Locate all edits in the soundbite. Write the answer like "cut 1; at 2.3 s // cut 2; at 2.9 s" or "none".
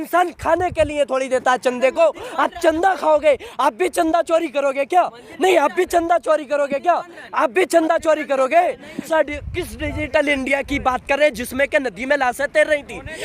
cut 1; at 9.0 s